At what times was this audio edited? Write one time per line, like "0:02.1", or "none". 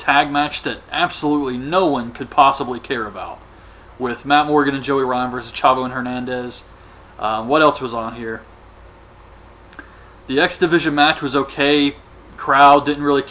0:05.9